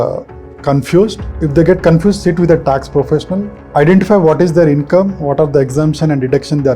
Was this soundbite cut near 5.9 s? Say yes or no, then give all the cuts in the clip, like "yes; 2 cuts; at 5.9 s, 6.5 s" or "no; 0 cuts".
no; 2 cuts; at 1.3 s, 3.6 s